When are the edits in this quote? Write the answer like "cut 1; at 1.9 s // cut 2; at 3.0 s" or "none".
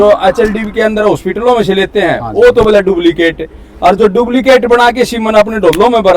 none